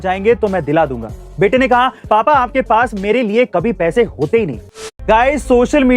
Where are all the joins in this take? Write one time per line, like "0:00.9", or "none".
0:04.9

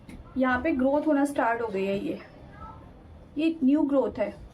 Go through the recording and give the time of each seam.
none

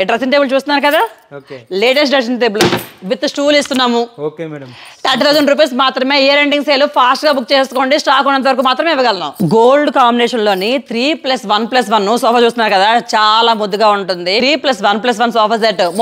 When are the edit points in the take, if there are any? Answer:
0:09.3
0:14.4

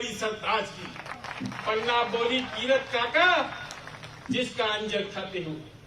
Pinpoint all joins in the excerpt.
none

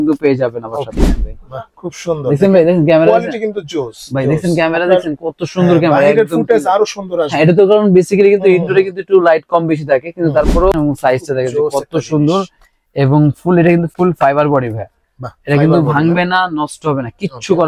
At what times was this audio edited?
0:01.0
0:10.7

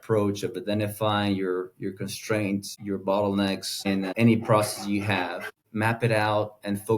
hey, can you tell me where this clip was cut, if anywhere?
0:04.0
0:05.6

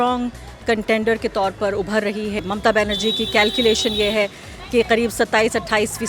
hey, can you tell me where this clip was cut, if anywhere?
0:02.4

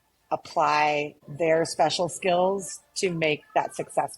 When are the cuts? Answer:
0:01.2

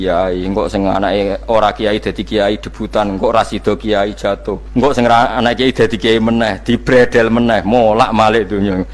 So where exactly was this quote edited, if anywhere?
0:04.6

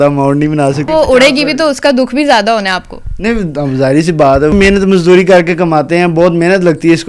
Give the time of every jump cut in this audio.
0:00.9
0:04.5

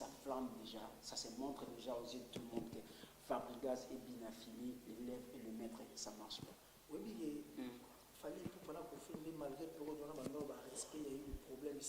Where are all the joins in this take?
0:06.3

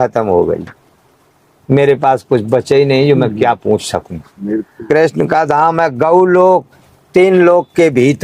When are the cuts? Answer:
0:04.8

